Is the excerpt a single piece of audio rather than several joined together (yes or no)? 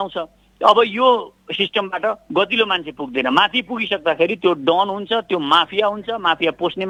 yes